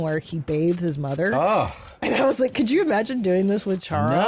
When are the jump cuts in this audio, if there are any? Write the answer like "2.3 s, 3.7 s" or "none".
none